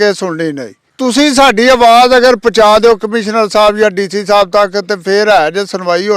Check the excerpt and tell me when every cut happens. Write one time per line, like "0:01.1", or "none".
0:00.9